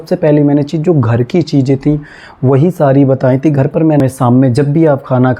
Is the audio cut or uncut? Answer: cut